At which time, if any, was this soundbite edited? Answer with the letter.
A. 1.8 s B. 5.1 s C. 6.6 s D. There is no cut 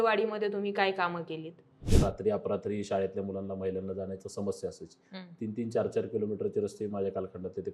A